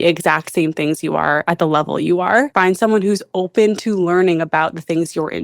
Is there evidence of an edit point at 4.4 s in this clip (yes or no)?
no